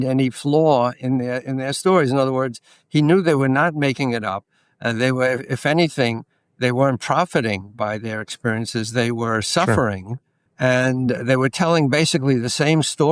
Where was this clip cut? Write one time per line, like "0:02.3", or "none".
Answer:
none